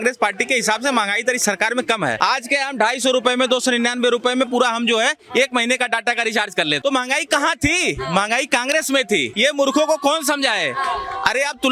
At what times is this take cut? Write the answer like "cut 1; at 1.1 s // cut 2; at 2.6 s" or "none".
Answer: cut 1; at 2.2 s // cut 2; at 6.8 s // cut 3; at 9.3 s